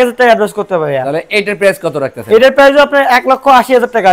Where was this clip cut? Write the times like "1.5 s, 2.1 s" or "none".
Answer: none